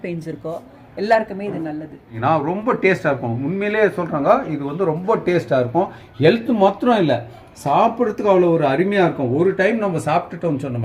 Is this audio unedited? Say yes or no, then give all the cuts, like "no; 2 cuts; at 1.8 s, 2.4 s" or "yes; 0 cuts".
no; 1 cut; at 2.2 s